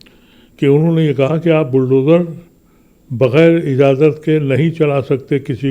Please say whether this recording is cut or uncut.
uncut